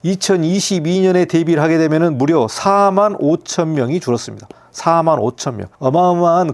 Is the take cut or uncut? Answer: uncut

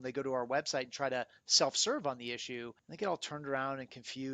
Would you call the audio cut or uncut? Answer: cut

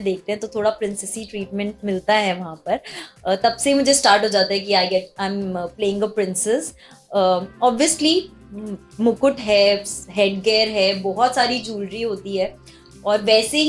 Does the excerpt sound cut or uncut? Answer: uncut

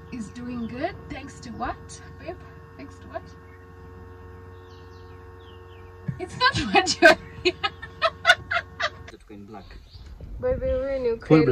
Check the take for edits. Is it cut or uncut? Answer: cut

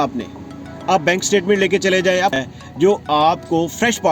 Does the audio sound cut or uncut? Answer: cut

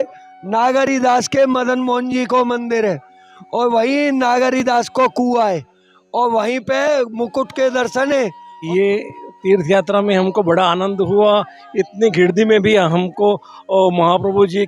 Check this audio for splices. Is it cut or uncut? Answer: cut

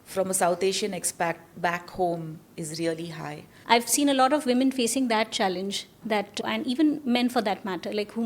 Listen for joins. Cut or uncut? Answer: cut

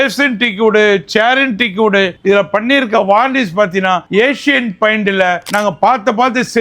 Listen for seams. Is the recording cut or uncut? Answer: uncut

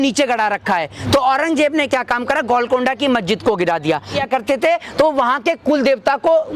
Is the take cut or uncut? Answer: cut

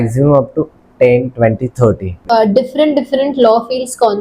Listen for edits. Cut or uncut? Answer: cut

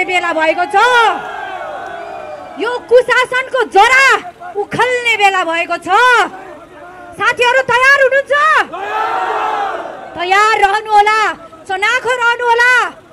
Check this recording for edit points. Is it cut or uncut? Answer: uncut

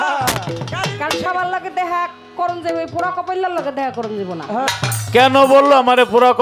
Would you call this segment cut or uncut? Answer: cut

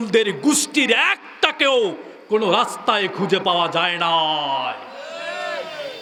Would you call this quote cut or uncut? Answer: uncut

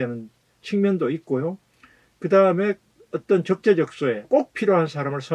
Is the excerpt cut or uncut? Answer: cut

